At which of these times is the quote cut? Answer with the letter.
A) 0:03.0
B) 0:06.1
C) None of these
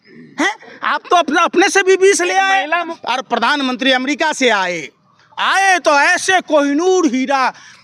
A